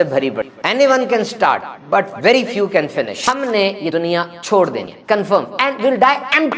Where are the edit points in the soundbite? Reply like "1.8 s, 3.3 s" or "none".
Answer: 3.1 s